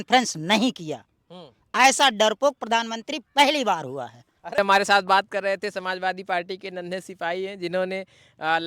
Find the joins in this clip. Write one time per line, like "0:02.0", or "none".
0:04.6